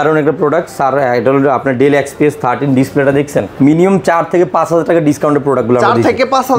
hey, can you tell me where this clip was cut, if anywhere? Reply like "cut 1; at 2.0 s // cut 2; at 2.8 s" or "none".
cut 1; at 3.5 s